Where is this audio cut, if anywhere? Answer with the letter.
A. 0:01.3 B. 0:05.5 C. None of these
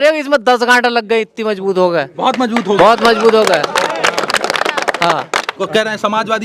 B